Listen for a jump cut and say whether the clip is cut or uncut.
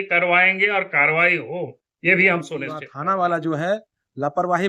cut